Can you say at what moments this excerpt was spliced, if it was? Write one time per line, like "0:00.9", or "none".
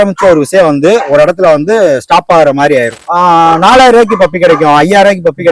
0:03.0

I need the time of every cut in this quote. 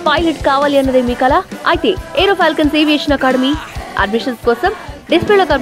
none

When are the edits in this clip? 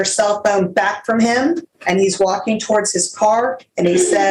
0:01.7

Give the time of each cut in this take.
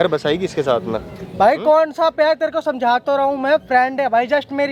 none

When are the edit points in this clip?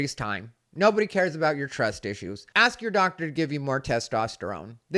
0:02.5

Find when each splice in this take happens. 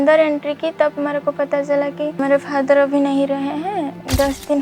0:02.2

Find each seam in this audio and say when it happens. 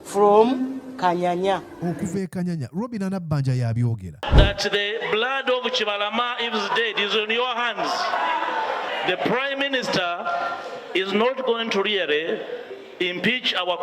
0:04.3

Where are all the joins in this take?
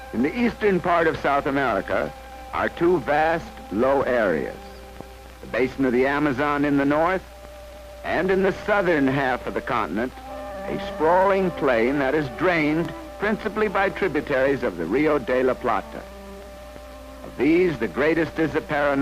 none

